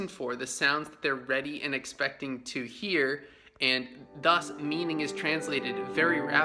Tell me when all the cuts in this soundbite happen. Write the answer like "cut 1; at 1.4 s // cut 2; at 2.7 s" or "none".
none